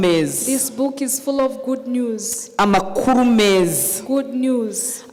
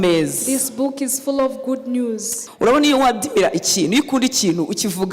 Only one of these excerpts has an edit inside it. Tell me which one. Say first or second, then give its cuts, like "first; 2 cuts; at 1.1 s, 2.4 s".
second; 1 cut; at 2.3 s